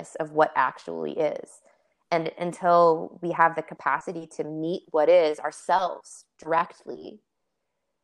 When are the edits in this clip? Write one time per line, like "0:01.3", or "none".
none